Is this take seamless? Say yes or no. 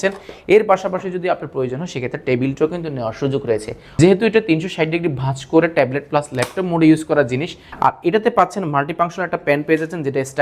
no